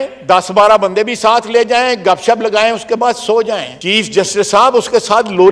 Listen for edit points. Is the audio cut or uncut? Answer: cut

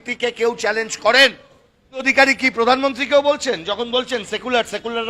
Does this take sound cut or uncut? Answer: cut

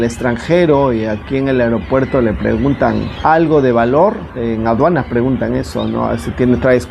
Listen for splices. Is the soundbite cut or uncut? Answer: cut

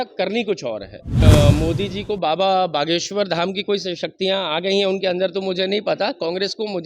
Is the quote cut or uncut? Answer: cut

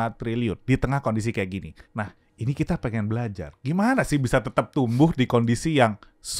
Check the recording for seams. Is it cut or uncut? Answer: cut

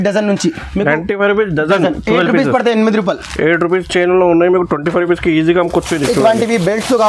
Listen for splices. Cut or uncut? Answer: uncut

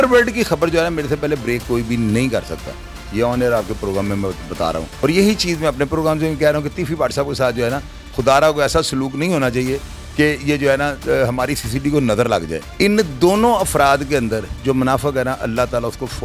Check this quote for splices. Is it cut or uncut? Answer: cut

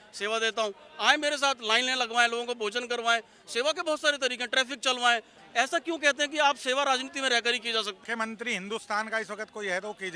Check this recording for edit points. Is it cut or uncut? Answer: cut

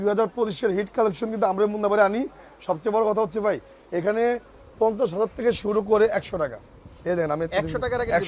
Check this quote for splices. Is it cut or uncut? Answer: uncut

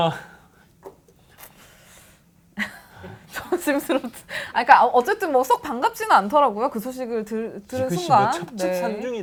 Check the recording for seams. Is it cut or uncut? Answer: uncut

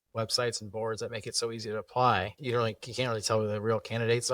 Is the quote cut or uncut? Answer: cut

